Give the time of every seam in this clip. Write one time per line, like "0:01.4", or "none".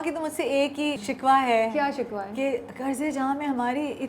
0:01.0